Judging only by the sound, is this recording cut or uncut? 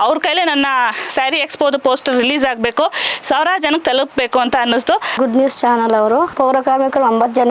cut